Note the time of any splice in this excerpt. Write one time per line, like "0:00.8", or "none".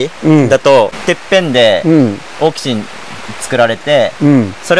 0:01.0